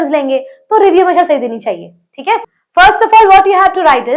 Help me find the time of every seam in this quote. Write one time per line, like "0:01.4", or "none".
0:02.6